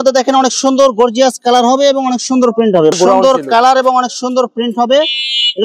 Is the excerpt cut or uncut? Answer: cut